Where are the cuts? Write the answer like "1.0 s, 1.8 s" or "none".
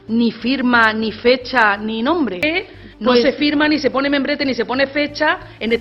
2.4 s